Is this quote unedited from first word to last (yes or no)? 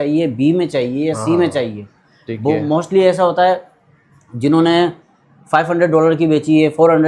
yes